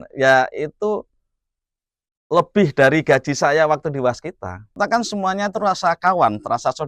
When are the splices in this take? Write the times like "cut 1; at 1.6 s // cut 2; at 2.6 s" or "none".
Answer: cut 1; at 4.8 s